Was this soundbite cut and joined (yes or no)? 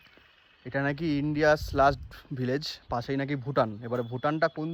no